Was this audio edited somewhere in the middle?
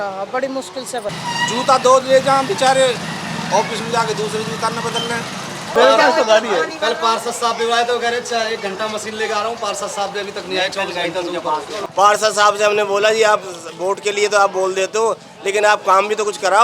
yes; 3 cuts; at 1.1 s, 5.6 s, 11.8 s

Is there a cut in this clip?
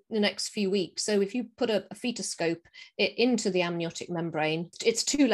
no; 0 cuts

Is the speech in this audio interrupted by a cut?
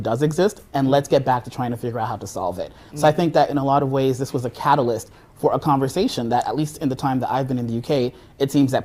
no; 0 cuts

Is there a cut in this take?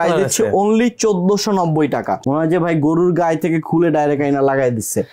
yes; 1 cut; at 2.1 s

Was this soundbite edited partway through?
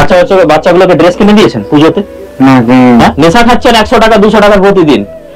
no; 0 cuts

